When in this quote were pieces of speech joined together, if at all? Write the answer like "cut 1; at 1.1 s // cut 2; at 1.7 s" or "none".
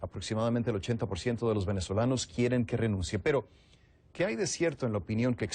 cut 1; at 3.8 s